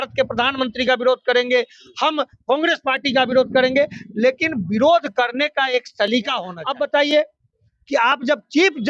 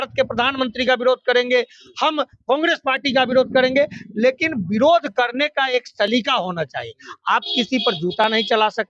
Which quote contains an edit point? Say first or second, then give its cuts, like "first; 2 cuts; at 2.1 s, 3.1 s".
first; 1 cut; at 6.5 s